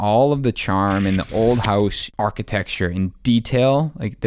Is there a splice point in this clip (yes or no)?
yes